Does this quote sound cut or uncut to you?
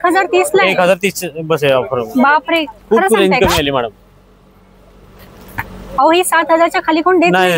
uncut